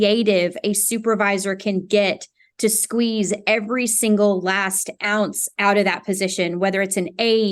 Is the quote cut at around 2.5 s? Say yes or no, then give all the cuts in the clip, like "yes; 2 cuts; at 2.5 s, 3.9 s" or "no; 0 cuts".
no; 1 cut; at 5.5 s